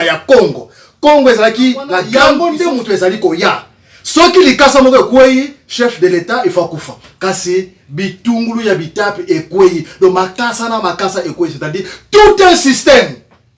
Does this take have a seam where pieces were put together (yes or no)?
yes